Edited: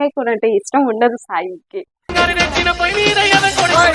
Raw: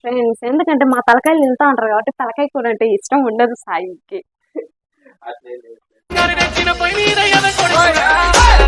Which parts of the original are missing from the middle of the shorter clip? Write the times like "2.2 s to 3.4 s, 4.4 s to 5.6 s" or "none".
4.3 s to 6.0 s